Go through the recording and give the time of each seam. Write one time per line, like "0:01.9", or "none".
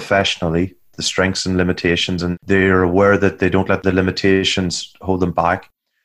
0:02.3
0:03.8